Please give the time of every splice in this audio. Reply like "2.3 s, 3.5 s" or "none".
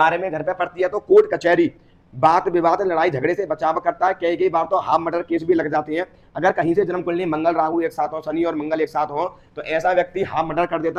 none